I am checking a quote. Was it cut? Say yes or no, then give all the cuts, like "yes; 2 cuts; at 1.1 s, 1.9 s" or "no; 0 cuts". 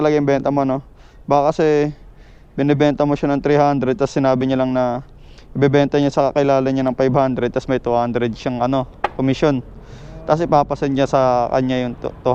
no; 0 cuts